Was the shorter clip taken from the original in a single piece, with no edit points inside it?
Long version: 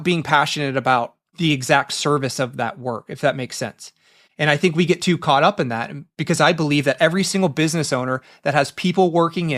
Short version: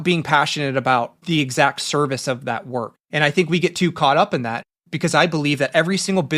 no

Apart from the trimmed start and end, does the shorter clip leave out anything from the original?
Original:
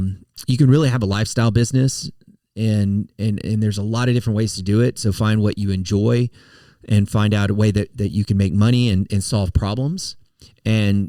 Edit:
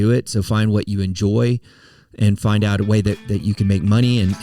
no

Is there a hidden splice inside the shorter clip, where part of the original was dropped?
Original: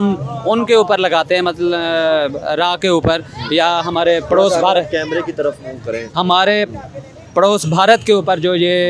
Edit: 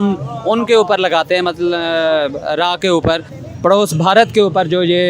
yes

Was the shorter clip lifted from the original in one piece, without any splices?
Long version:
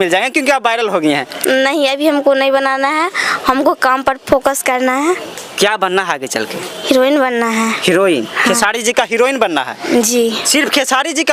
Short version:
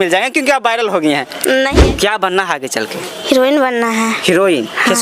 no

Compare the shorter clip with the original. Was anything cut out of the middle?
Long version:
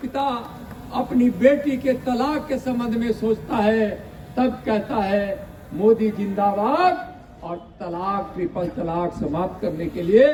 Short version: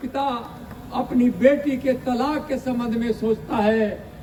no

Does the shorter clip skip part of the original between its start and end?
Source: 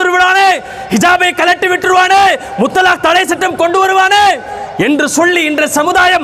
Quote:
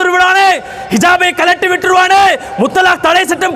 no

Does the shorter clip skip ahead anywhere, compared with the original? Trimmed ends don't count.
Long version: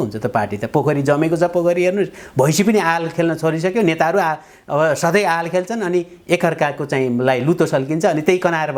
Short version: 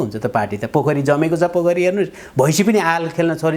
no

